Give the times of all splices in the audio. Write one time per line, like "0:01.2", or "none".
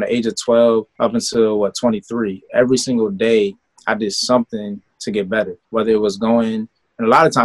0:00.9
0:05.6

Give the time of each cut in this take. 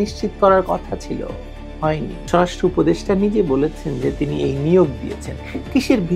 0:02.2

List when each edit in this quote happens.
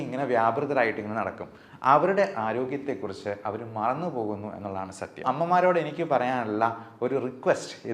0:05.2

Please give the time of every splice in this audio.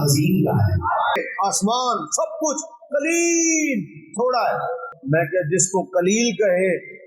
0:01.2
0:04.9

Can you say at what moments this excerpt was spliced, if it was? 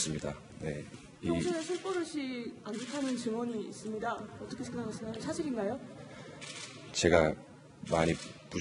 0:06.5

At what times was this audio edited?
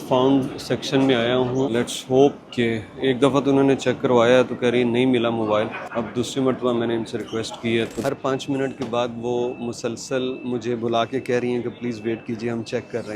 0:01.7
0:05.8
0:08.0

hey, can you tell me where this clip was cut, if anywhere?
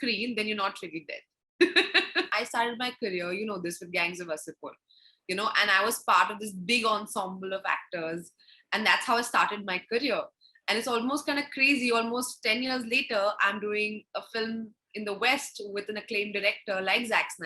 0:02.3

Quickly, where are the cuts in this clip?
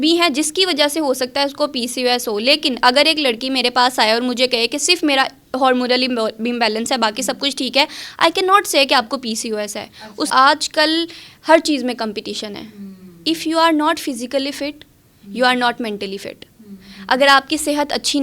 0:10.3

